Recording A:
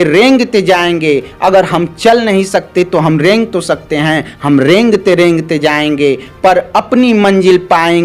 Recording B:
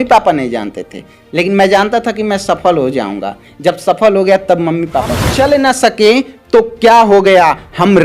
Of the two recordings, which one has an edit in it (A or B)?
B